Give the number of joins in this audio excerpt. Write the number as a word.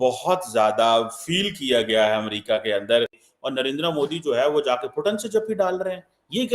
one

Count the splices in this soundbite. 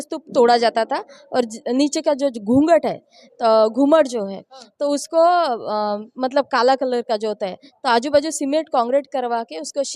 zero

